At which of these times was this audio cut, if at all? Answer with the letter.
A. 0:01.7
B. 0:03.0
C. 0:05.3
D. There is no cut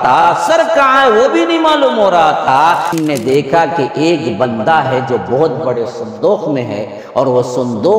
B